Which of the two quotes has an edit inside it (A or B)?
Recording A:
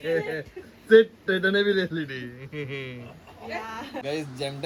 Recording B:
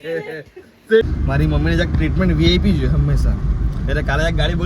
B